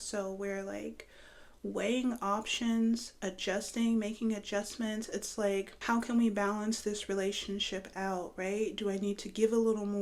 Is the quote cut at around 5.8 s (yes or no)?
yes